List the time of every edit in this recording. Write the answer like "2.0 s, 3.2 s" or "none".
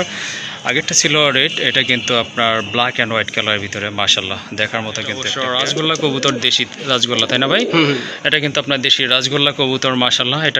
5.3 s